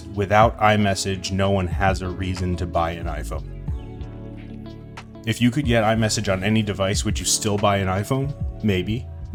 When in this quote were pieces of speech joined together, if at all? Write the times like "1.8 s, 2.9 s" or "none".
none